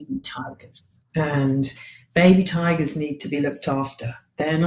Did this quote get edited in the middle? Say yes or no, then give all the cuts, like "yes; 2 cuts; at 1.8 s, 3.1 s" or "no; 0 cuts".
no; 0 cuts